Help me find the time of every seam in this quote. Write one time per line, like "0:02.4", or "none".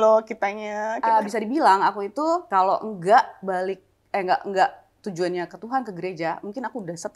0:00.9
0:02.4